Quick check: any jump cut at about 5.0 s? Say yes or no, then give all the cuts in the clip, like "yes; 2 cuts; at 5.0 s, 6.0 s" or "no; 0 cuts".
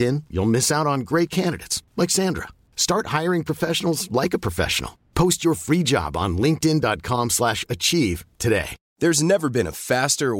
no; 1 cut; at 8.8 s